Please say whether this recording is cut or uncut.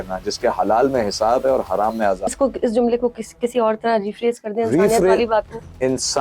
cut